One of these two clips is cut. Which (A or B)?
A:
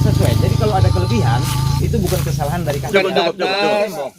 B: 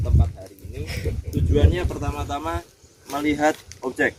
A